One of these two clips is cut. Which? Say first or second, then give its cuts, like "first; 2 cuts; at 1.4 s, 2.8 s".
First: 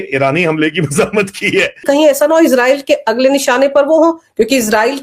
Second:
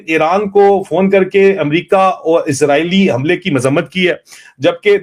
first; 1 cut; at 1.8 s